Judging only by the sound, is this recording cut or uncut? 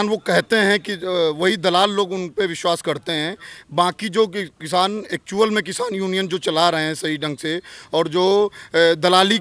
uncut